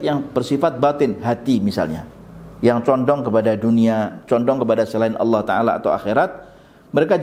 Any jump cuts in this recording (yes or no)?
no